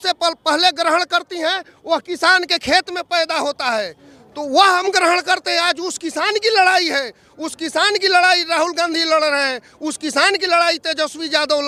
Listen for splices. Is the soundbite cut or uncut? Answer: uncut